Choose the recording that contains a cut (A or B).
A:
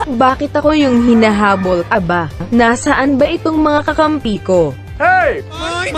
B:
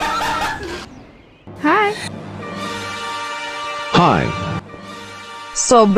A